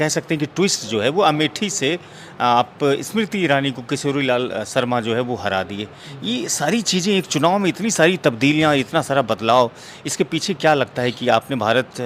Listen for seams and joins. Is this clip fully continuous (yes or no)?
yes